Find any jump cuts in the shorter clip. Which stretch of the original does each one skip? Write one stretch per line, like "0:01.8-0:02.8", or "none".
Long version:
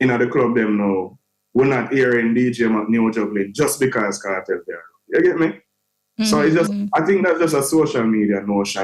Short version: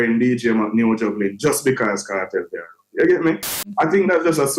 0:05.8-0:06.8